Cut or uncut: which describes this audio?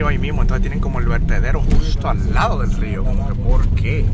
uncut